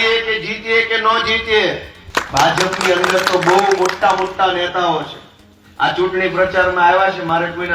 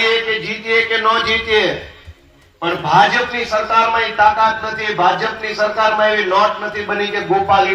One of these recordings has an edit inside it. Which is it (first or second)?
first